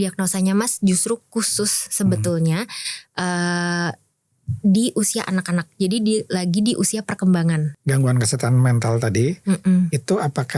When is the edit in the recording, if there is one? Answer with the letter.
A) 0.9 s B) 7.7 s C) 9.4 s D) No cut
B